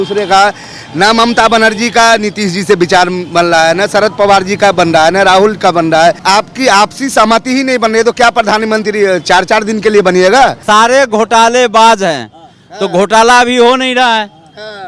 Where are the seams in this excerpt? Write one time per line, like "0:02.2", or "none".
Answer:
0:06.2
0:10.6